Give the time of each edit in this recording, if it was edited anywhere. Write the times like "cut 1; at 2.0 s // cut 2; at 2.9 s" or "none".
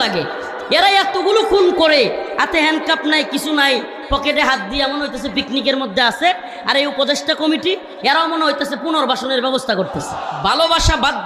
cut 1; at 10.2 s